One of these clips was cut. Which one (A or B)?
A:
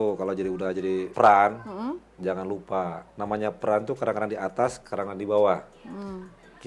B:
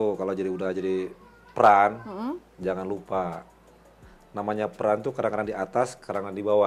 A